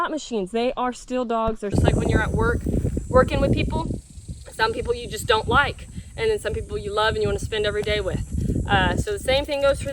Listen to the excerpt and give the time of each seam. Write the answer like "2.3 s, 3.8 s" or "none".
1.7 s